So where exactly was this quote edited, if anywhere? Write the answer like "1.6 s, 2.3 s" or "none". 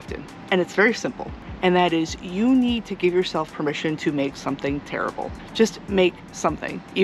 none